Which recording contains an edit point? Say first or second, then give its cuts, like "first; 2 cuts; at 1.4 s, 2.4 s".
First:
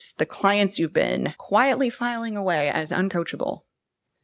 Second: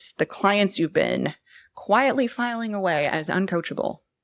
first; 1 cut; at 1.4 s